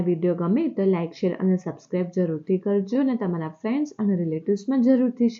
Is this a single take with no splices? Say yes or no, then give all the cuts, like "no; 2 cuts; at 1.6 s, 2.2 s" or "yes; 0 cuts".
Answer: yes; 0 cuts